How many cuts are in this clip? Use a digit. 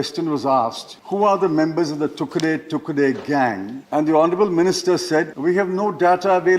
3